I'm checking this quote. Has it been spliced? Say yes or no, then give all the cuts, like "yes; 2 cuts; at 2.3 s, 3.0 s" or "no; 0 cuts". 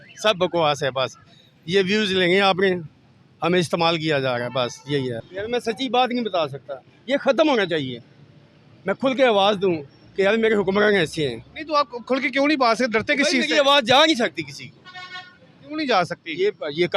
yes; 1 cut; at 5.3 s